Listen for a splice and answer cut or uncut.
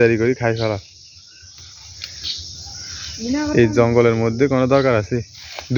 uncut